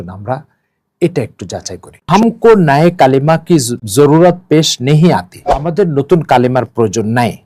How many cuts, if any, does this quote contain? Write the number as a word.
three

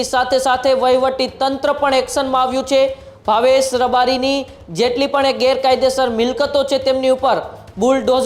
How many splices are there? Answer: zero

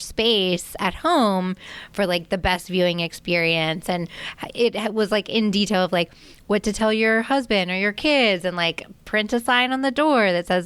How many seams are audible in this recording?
zero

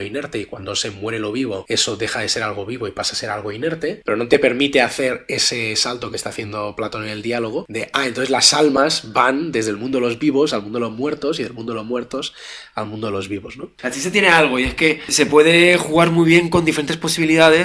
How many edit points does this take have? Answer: five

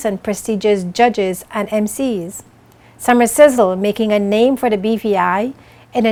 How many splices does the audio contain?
zero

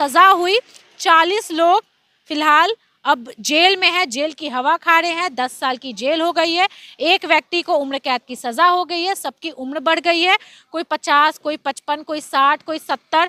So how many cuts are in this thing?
zero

